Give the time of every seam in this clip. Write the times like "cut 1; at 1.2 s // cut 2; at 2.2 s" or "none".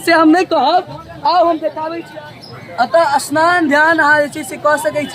cut 1; at 1.9 s